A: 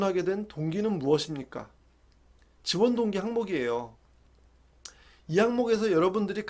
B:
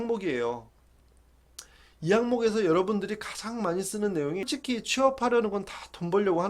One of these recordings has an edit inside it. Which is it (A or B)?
B